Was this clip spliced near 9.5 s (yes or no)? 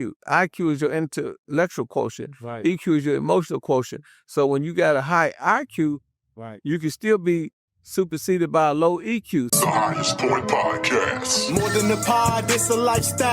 yes